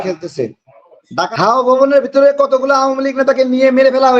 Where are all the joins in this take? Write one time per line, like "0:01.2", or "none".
0:01.3